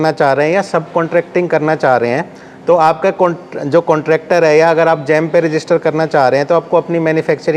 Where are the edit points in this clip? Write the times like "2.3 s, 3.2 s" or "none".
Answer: none